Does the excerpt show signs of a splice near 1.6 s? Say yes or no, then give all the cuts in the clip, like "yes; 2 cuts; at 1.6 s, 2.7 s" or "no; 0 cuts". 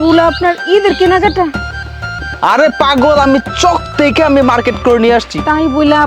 no; 0 cuts